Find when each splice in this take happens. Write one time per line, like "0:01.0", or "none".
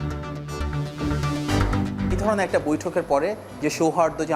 0:02.2